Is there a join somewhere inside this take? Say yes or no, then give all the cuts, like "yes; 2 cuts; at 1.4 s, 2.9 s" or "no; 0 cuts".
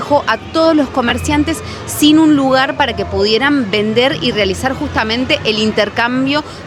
no; 0 cuts